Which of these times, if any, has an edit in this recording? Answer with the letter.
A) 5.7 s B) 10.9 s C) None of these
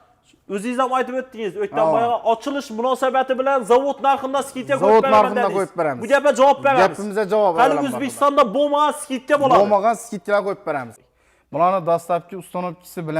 B